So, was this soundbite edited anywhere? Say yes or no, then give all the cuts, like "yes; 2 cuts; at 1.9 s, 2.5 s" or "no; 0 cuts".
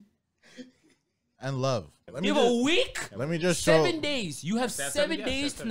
yes; 1 cut; at 2.0 s